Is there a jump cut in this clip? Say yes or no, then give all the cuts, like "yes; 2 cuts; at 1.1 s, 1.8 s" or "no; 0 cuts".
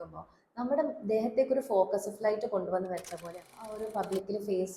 yes; 1 cut; at 3.7 s